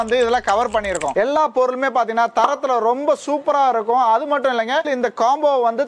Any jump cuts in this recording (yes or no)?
yes